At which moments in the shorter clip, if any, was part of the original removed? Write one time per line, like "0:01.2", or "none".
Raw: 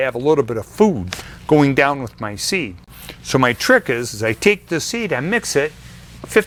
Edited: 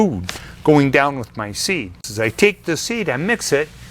0:02.1